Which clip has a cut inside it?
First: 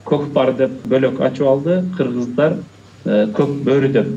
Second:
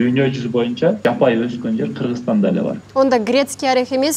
second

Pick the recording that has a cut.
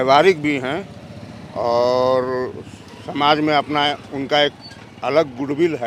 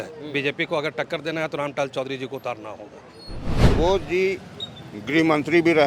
second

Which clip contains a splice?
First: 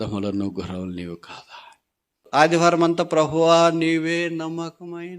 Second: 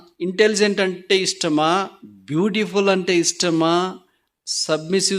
first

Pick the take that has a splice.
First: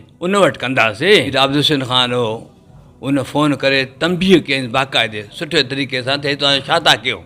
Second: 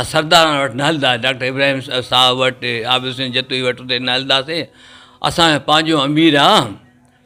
first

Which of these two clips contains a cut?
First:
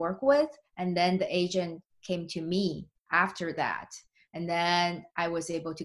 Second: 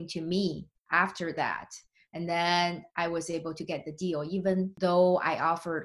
second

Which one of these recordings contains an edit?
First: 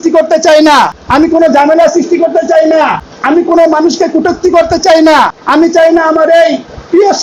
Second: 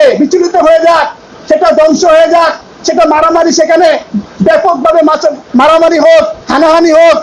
first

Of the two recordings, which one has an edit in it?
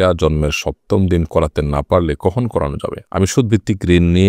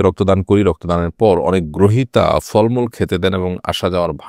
first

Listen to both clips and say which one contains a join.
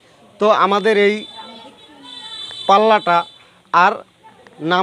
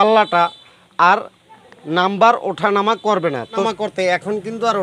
second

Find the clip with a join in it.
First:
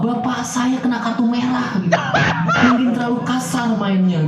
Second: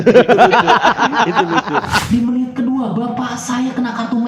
second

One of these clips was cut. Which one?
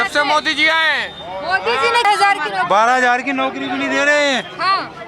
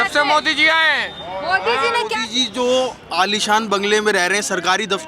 second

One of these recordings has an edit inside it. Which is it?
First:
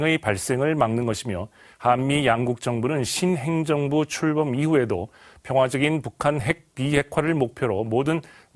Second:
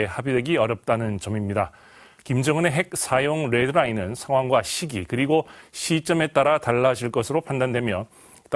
second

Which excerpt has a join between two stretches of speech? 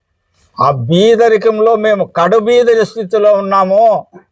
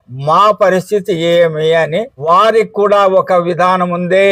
second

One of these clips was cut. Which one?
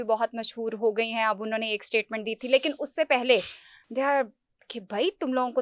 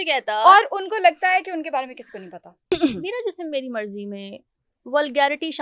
second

